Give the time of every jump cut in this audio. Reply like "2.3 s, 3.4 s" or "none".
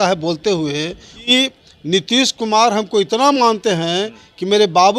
1.3 s